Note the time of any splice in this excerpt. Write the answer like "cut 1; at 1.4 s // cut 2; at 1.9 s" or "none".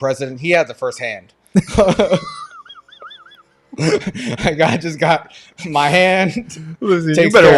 none